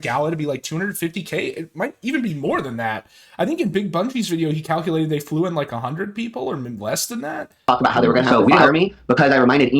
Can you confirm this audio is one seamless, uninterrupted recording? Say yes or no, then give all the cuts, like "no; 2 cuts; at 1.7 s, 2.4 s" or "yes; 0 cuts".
no; 1 cut; at 7.6 s